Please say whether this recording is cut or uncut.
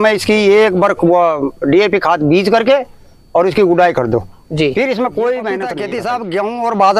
cut